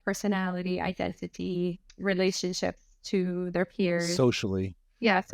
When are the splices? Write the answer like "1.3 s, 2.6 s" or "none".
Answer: 1.9 s